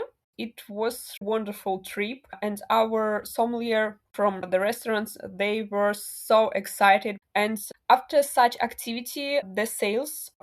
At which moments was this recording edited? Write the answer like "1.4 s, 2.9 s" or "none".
1.2 s, 4.5 s, 7.4 s